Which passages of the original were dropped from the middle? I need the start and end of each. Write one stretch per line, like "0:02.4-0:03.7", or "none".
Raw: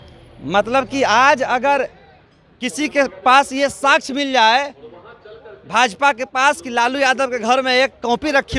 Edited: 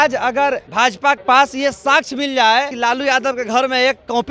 0:02.4-0:03.1
0:04.7-0:06.7

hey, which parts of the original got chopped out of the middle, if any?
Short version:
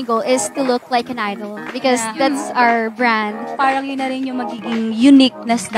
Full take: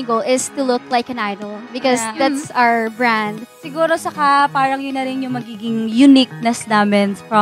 0:03.6-0:04.5

